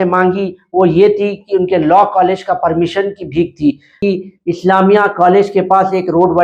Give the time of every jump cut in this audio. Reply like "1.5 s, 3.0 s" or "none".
4.0 s